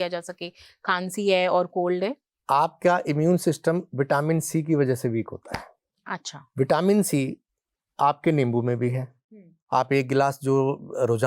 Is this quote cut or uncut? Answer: cut